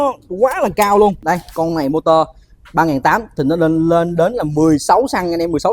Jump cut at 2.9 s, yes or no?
no